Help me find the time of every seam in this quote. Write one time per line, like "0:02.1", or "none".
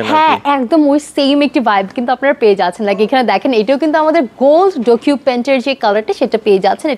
none